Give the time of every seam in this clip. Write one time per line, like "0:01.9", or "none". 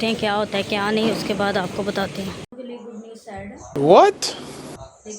0:02.5